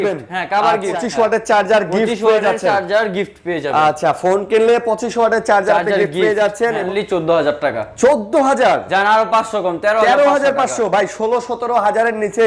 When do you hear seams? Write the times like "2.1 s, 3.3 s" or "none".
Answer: 1.0 s, 6.8 s

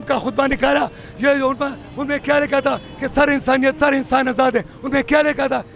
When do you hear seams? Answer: 3.8 s

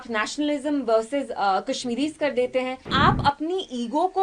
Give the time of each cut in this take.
2.9 s

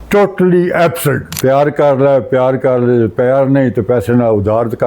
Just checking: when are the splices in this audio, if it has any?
1.3 s

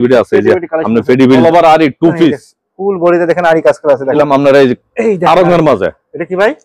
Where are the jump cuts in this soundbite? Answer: 1.4 s, 4.1 s

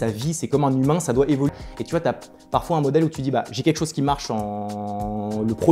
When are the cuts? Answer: 1.5 s

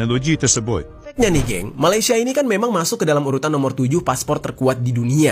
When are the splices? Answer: 1.0 s

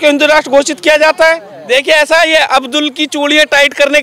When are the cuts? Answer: 1.5 s

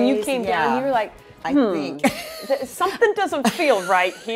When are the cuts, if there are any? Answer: none

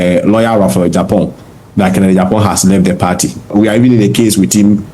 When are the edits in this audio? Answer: 3.4 s

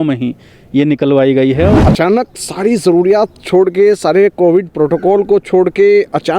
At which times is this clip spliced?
1.8 s

